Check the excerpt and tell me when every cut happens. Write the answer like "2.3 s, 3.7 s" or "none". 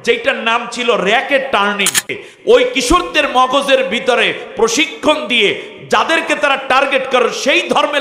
2.3 s

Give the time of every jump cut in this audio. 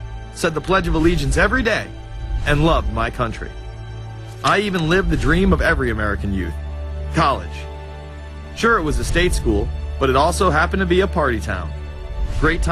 1.2 s

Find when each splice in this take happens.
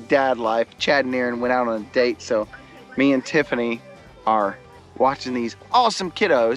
none

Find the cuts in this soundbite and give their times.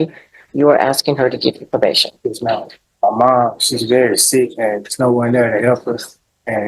2.8 s

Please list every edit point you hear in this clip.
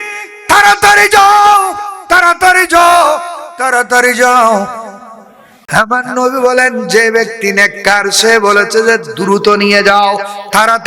5.5 s

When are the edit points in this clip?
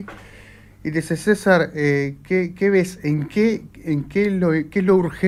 none

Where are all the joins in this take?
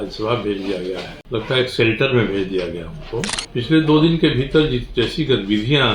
1.1 s, 3.4 s

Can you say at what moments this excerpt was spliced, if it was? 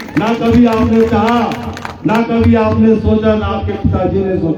none

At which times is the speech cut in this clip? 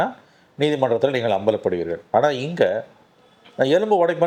none

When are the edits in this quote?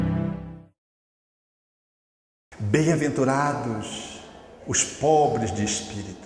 none

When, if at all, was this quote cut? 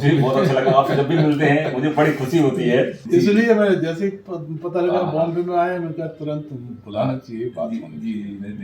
3.0 s

